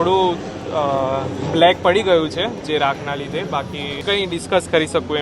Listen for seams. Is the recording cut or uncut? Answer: cut